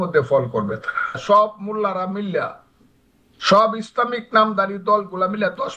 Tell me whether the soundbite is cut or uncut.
cut